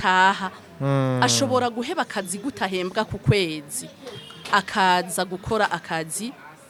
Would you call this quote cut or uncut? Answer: uncut